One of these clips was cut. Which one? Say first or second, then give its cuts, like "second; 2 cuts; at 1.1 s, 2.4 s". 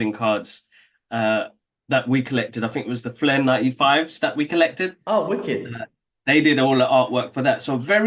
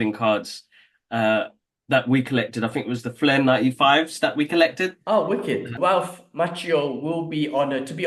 second; 1 cut; at 5.8 s